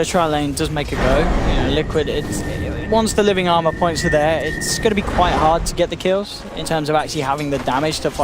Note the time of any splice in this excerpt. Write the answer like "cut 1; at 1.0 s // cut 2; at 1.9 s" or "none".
cut 1; at 3.1 s